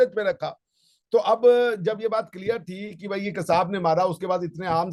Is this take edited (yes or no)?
no